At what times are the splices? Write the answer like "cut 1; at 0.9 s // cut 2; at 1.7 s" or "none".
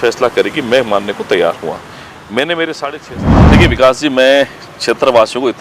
cut 1; at 3.0 s